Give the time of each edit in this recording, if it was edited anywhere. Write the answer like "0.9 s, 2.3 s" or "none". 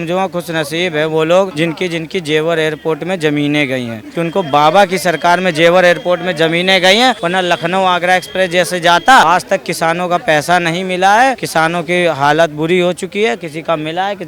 1.5 s, 4.0 s, 7.2 s, 9.2 s, 11.4 s